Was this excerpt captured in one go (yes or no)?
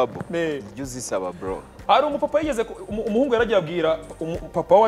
yes